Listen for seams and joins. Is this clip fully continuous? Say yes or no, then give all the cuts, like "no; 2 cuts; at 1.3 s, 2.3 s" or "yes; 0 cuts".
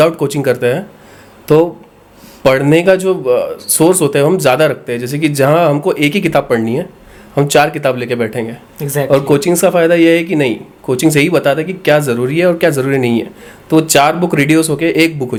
yes; 0 cuts